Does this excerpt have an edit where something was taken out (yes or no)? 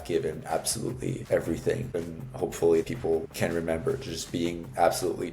yes